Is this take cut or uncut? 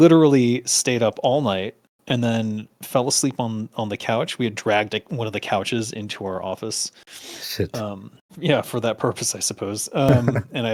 uncut